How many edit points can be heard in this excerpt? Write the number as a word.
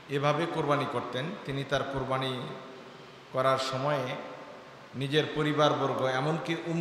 zero